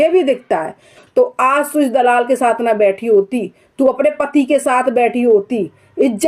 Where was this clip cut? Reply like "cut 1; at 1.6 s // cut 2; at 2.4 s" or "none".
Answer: cut 1; at 1.0 s